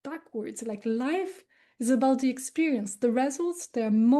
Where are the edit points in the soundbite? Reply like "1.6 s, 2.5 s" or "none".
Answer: none